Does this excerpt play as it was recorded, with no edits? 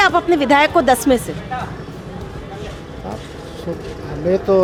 yes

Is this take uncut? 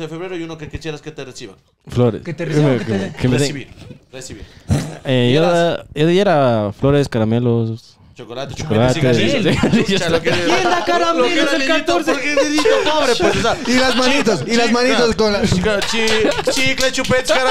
yes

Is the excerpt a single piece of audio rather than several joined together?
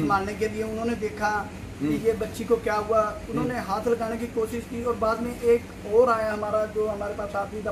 yes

